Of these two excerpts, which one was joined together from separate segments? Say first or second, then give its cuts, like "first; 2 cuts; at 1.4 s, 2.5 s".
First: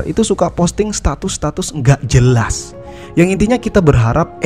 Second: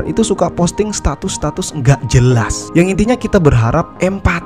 second; 1 cut; at 2.6 s